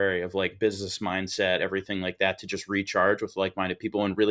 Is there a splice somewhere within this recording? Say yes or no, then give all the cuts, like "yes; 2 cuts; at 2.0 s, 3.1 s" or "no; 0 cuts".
no; 0 cuts